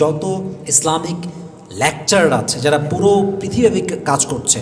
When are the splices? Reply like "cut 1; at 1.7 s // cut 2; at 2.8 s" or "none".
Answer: none